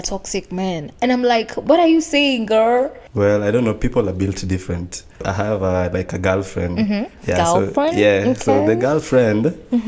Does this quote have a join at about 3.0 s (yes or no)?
yes